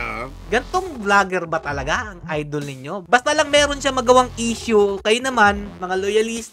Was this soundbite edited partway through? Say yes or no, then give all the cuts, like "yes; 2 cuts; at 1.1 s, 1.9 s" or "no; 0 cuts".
no; 0 cuts